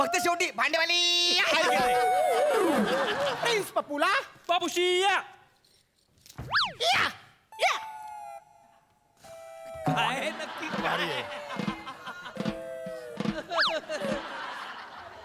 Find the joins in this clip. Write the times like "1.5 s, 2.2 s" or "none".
3.4 s